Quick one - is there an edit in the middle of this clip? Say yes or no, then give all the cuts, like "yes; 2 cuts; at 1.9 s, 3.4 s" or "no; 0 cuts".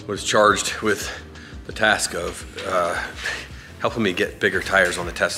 no; 0 cuts